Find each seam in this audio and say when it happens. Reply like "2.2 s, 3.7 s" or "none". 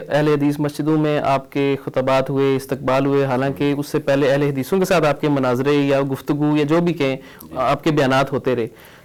none